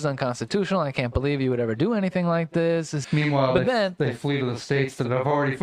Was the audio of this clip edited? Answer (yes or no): yes